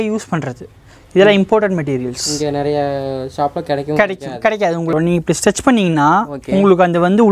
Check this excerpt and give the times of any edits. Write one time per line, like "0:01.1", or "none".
0:04.9